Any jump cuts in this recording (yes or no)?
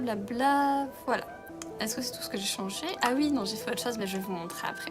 no